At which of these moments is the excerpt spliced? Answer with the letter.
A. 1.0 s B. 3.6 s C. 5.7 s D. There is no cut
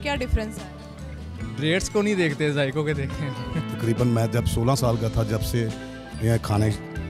B